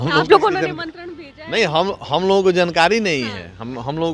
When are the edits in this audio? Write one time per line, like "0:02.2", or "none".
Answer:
none